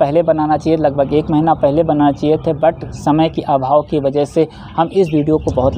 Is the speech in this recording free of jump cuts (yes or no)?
yes